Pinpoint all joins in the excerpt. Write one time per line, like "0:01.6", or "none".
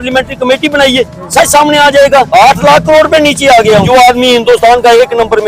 0:02.3
0:03.9